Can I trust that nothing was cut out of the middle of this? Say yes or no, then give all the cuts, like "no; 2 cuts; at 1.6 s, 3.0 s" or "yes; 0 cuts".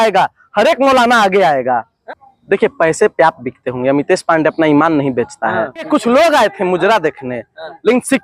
no; 2 cuts; at 2.0 s, 5.7 s